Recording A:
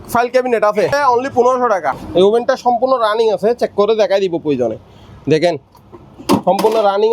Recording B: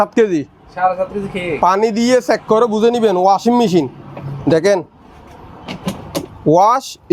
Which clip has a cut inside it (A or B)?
A